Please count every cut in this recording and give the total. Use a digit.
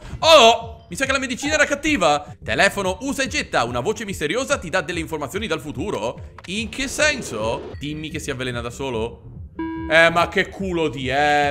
2